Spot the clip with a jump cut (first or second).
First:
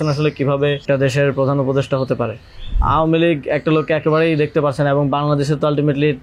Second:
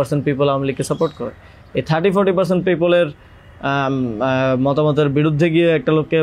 first